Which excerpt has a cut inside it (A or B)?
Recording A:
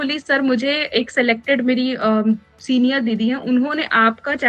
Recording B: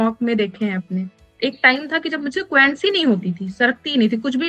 B